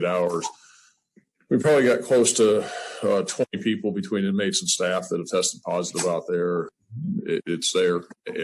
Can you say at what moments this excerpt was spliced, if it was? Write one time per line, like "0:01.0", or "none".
0:06.8